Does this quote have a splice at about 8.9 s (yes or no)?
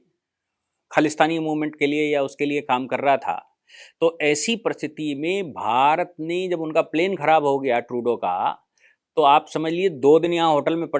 no